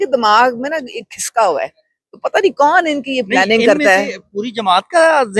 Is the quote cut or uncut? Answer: uncut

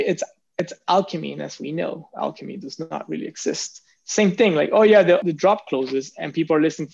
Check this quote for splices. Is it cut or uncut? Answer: cut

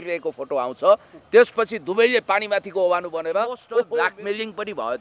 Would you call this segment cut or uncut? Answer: cut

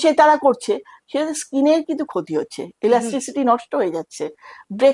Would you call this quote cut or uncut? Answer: uncut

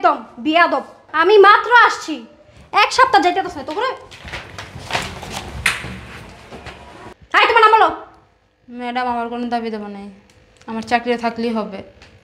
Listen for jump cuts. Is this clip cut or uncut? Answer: uncut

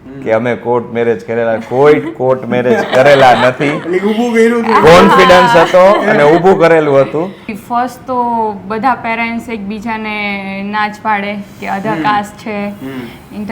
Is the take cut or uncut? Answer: cut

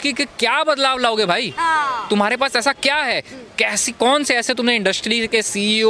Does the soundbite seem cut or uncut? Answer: uncut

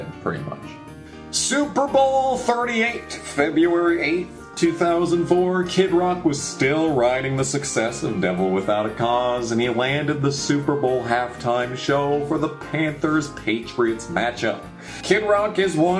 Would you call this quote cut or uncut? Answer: cut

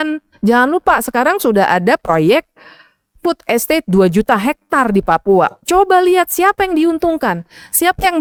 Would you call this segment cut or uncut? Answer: uncut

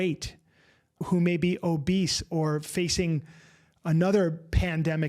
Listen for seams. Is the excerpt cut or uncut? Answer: cut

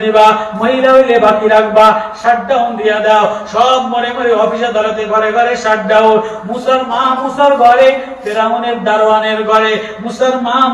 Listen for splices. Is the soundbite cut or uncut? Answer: uncut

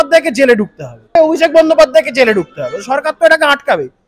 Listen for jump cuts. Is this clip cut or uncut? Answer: cut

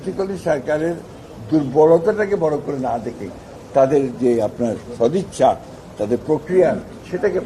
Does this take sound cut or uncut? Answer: uncut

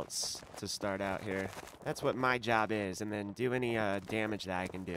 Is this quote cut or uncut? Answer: cut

